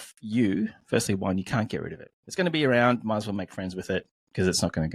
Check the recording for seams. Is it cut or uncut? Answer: uncut